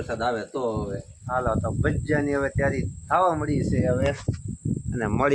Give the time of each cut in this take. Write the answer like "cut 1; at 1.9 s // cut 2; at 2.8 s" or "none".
cut 1; at 1.2 s